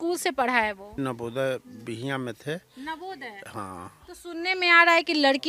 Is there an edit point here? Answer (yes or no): yes